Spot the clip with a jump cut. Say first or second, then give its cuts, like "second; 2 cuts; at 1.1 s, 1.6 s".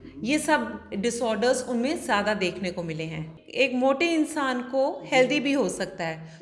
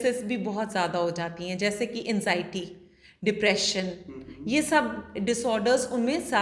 first; 1 cut; at 3.3 s